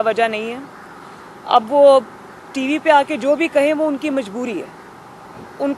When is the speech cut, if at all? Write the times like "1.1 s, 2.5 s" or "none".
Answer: none